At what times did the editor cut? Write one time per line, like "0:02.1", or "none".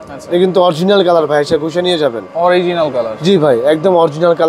none